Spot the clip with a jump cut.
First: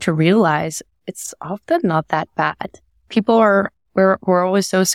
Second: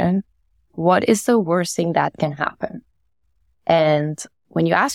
first; 1 cut; at 3.1 s

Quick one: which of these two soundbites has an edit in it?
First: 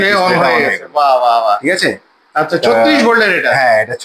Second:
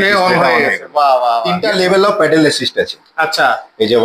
second; 1 cut; at 1.5 s

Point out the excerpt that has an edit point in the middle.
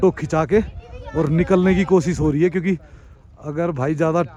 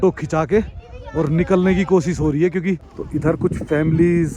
second; 1 cut; at 2.9 s

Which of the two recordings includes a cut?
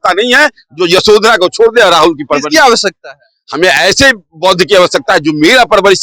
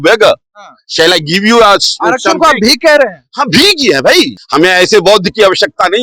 second; 1 cut; at 4.4 s

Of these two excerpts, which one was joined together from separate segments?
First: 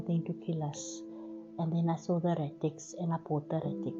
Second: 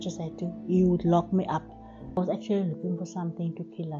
second; 1 cut; at 2.2 s

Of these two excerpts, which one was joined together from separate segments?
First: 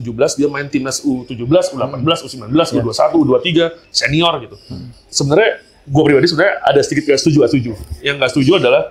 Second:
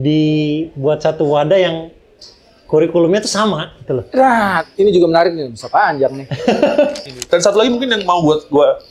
second; 1 cut; at 7.0 s

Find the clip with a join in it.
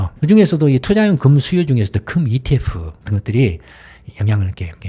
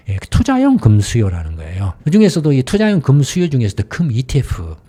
first; 1 cut; at 4.0 s

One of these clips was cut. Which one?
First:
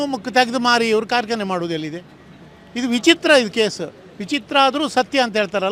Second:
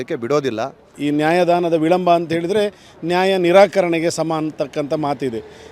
second; 1 cut; at 0.9 s

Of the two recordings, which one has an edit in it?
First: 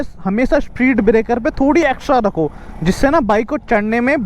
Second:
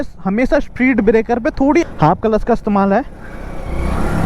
second; 1 cut; at 1.8 s

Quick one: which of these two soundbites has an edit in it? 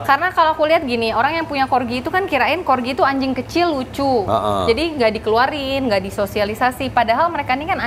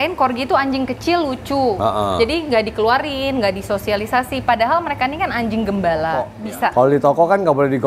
second; 1 cut; at 6.3 s

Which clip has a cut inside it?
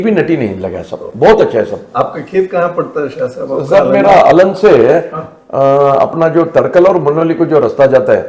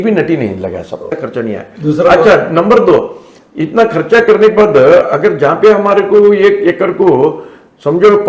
second; 1 cut; at 1.1 s

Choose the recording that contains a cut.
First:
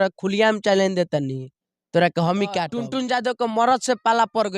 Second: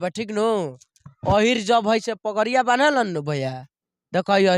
first; 1 cut; at 2.8 s

